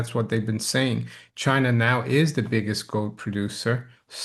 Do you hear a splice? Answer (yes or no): no